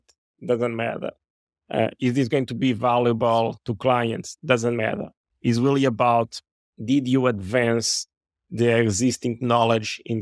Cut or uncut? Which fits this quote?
uncut